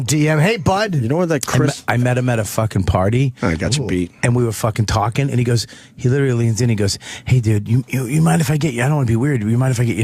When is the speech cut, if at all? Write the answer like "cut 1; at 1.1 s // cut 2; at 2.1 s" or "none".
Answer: cut 1; at 6.8 s